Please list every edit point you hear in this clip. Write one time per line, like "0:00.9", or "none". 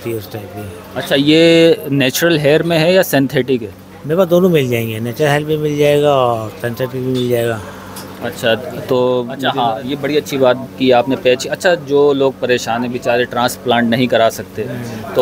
0:09.3